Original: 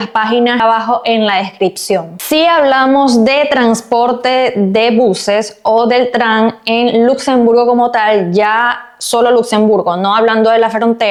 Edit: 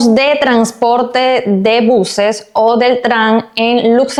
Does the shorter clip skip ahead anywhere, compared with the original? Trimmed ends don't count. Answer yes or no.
no